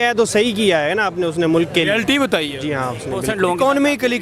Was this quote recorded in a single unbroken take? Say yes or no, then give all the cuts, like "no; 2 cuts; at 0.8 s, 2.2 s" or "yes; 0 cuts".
no; 1 cut; at 3.3 s